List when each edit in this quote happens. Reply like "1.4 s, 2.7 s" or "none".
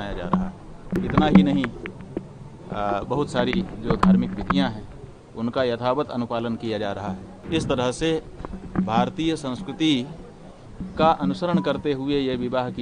1.0 s, 7.3 s